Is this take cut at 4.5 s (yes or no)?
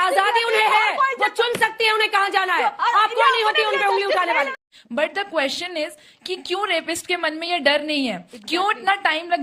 yes